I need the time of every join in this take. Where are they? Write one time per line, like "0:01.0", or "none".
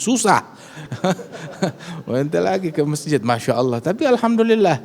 none